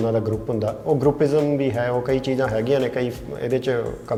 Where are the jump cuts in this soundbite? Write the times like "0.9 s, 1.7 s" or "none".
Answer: none